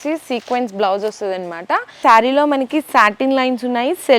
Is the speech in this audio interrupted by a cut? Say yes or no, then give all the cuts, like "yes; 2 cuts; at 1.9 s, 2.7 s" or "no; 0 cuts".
yes; 1 cut; at 2.0 s